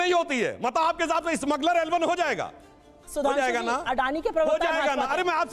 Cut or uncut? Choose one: uncut